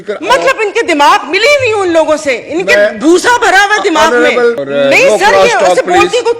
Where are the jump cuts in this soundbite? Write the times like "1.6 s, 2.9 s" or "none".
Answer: 4.6 s